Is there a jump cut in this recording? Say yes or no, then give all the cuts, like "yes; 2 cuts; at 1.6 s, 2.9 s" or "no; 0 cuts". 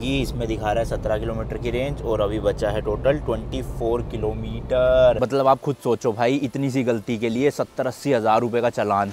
yes; 1 cut; at 5.2 s